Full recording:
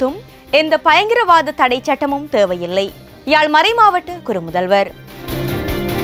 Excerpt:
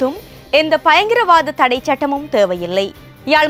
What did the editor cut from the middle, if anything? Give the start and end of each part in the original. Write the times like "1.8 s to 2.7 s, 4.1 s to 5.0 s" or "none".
none